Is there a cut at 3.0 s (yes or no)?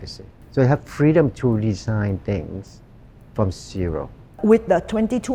no